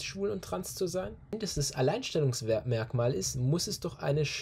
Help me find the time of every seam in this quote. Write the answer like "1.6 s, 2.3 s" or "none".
1.4 s